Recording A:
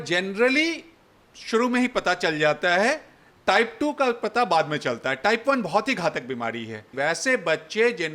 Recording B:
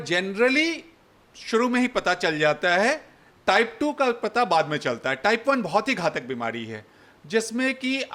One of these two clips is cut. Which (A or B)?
A